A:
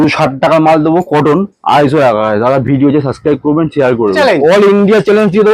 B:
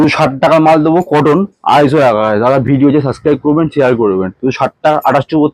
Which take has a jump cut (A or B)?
A